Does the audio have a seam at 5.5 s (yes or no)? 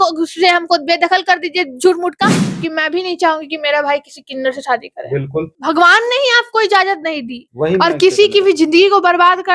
yes